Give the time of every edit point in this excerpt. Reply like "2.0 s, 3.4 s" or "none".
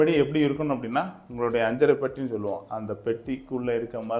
none